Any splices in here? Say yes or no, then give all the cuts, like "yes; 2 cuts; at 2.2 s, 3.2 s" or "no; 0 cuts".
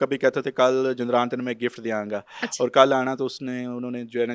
no; 0 cuts